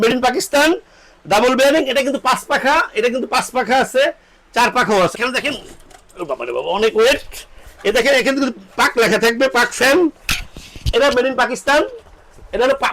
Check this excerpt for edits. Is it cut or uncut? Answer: cut